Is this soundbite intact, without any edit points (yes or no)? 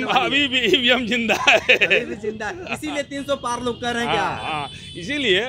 yes